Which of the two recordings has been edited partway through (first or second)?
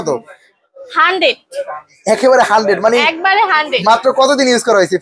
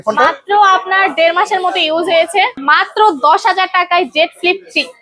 second